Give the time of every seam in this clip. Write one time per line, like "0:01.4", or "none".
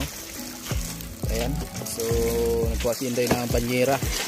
none